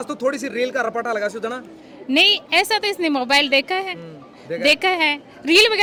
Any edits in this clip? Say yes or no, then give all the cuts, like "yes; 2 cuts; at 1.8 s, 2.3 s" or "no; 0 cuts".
no; 0 cuts